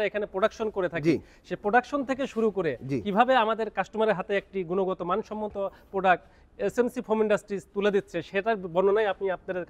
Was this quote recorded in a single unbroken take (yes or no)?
yes